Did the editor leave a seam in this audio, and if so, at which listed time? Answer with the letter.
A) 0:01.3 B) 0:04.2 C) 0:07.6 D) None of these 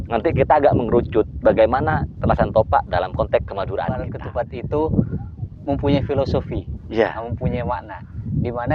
B